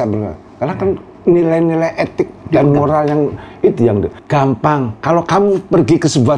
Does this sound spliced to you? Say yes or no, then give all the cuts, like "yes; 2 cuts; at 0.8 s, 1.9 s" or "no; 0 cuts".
yes; 3 cuts; at 1.1 s, 2.4 s, 4.2 s